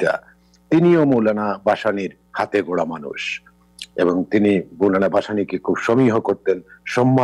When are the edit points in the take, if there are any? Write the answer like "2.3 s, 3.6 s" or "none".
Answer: none